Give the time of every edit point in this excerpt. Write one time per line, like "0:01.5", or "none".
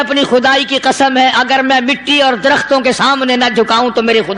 none